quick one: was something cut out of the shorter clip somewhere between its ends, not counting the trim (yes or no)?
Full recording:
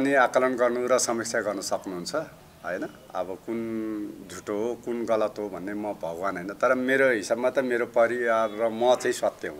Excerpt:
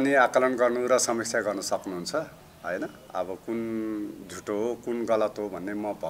no